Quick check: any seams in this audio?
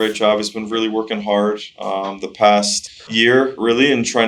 no; 0 cuts

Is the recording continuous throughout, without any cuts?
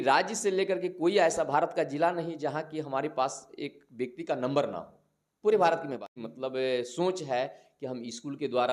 no; 1 cut; at 6.3 s

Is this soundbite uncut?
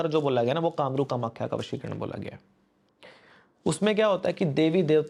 yes; 0 cuts

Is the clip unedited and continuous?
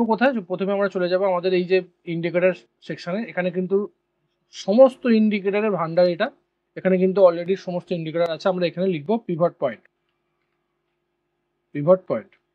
yes; 0 cuts

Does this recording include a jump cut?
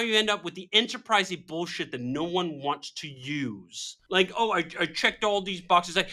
yes; 1 cut; at 4.0 s

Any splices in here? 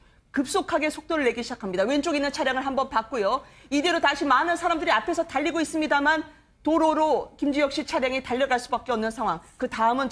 yes; 1 cut; at 6.1 s

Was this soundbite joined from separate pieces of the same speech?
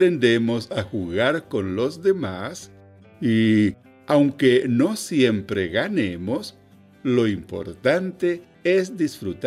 yes; 1 cut; at 8.5 s

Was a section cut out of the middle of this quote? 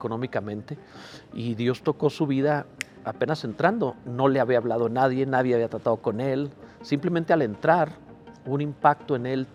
no; 0 cuts

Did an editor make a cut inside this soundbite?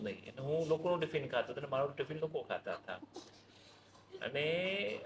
no; 0 cuts

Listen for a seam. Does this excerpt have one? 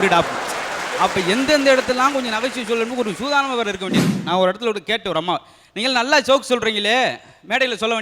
yes; 1 cut; at 4.2 s

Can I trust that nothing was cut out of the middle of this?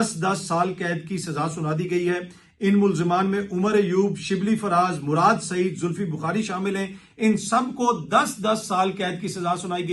yes; 0 cuts

